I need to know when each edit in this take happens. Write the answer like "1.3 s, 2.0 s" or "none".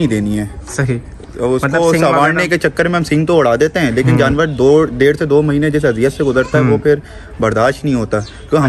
none